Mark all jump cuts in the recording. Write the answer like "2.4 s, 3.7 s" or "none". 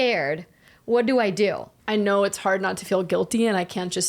1.7 s